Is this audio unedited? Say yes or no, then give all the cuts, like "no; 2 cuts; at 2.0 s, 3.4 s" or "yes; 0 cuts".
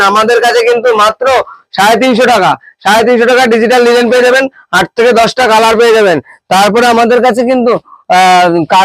yes; 0 cuts